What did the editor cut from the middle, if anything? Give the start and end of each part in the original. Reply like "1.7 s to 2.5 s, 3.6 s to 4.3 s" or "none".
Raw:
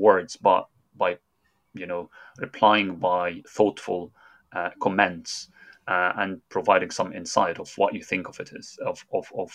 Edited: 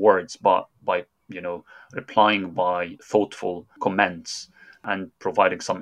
0.8 s to 1.3 s, 4.2 s to 4.7 s, 5.8 s to 6.1 s

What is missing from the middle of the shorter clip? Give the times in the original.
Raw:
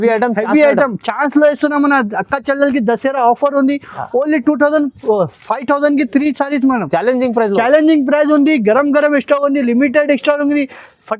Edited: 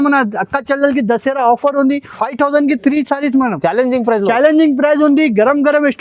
3.9 s to 5.4 s

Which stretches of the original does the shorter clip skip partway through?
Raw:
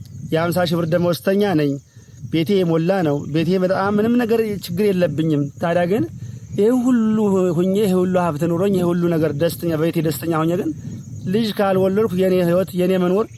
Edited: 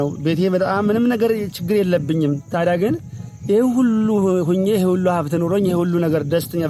none

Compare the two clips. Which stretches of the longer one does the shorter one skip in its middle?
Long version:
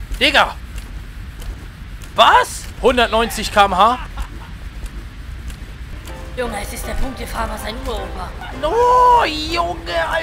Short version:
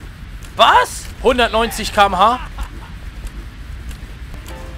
none

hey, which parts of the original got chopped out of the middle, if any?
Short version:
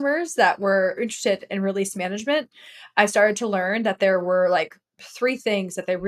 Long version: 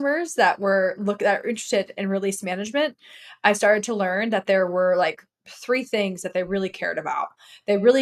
1.0 s to 1.4 s

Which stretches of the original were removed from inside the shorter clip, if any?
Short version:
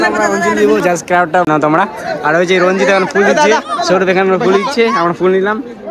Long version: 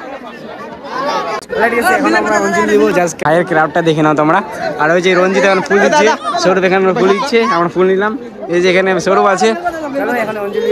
3.2 s to 3.7 s

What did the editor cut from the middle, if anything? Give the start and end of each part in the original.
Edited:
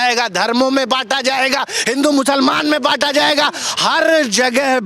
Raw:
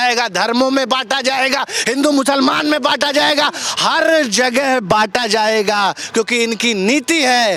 none

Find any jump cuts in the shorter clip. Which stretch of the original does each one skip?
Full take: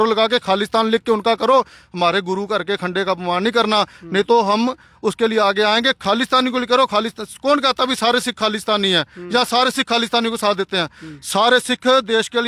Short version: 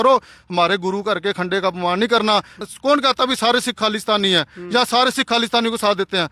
4.0 s to 7.2 s

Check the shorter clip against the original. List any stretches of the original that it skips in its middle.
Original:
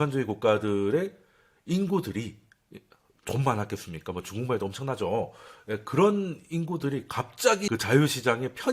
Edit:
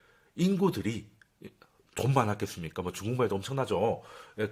none

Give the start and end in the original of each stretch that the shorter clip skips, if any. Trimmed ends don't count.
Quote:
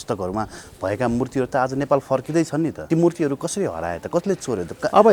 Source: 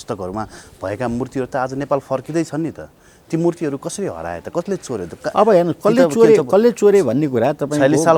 2.8 s to 3.2 s

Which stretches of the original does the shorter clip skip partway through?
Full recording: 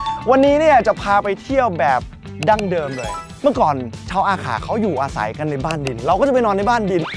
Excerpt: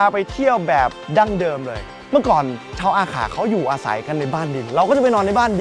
2.1 s to 2.3 s

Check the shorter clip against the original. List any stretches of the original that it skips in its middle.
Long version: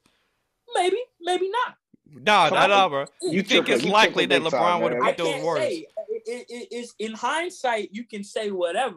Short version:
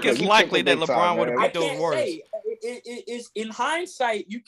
none

